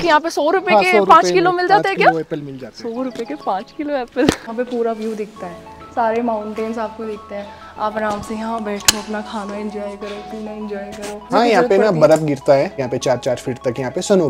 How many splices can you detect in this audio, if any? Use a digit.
2